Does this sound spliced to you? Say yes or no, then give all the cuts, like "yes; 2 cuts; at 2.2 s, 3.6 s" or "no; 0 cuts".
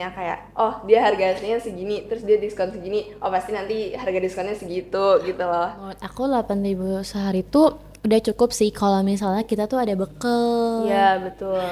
yes; 1 cut; at 6.0 s